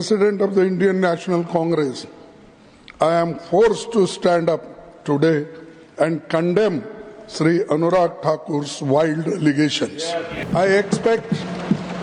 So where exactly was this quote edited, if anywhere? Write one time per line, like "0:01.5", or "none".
0:10.5